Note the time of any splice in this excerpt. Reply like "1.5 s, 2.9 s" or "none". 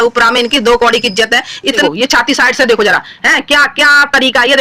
1.8 s